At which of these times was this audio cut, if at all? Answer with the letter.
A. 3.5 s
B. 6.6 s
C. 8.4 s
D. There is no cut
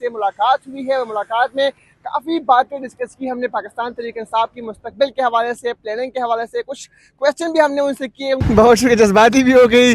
C